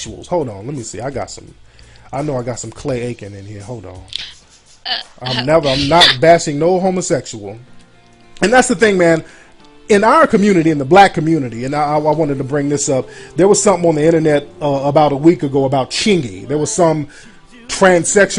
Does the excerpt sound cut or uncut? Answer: cut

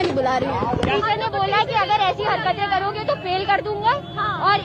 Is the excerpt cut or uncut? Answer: cut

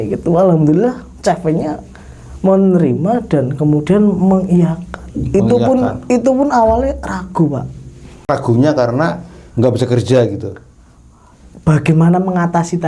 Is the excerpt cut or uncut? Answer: cut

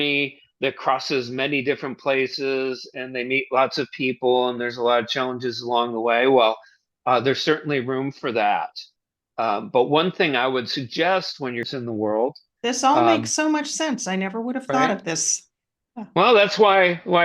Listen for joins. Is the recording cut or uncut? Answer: cut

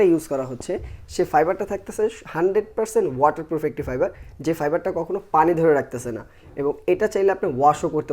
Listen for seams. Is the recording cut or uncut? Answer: uncut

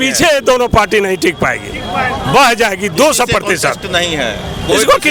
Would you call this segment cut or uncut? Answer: uncut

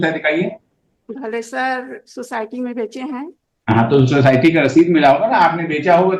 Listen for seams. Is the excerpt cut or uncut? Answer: uncut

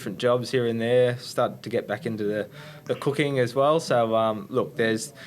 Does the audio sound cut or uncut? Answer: uncut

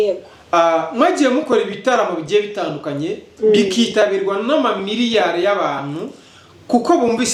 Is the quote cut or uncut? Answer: uncut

